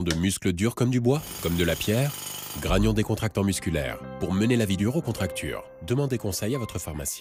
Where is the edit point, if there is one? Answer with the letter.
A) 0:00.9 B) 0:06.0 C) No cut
C